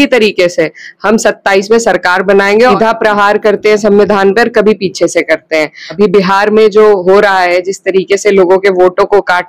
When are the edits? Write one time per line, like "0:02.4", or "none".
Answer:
0:02.7
0:05.8

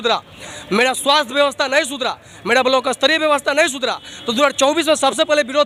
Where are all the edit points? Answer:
none

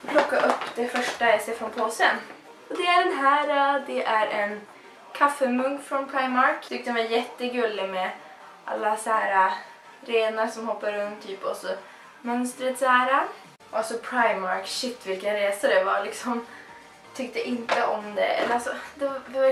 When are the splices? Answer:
none

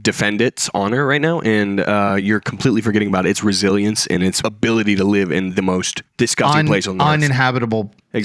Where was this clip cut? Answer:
0:04.4

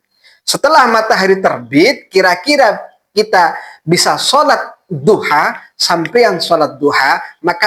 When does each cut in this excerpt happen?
none

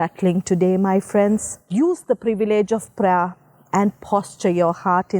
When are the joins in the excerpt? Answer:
0:01.6

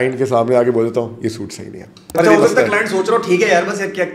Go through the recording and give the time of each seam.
0:02.2

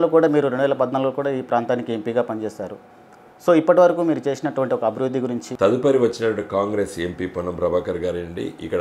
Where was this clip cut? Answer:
0:05.5

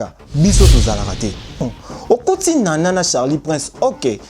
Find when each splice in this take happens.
0:01.7

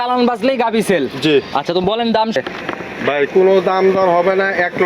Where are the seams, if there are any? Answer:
0:02.3

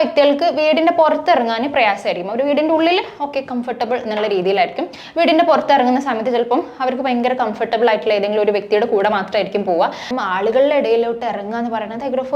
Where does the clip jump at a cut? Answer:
0:10.0

